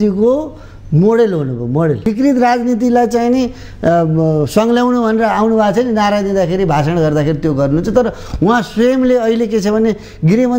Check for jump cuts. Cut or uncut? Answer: cut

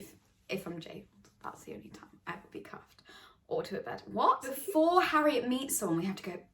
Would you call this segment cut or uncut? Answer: cut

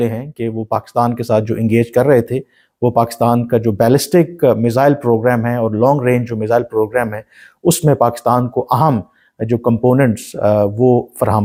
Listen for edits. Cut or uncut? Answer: uncut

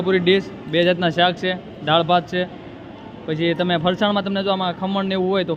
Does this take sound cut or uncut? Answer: uncut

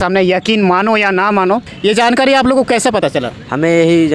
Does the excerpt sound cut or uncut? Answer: cut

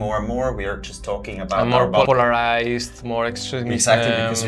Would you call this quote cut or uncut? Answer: cut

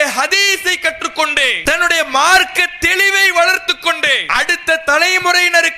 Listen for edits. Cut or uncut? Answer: cut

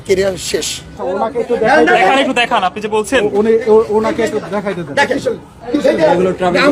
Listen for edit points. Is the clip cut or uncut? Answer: cut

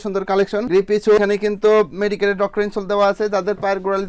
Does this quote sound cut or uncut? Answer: uncut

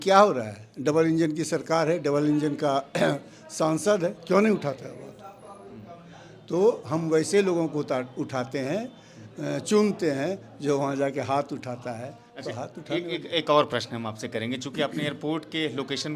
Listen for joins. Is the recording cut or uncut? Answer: uncut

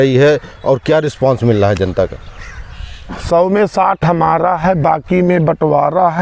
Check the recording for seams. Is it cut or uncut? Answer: uncut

